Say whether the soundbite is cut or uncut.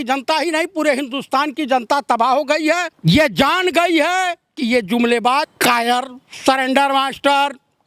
cut